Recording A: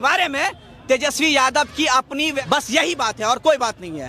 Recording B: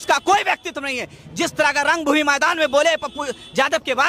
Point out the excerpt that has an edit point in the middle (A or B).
A